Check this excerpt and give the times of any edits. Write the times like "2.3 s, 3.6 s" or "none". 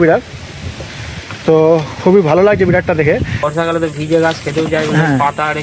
3.4 s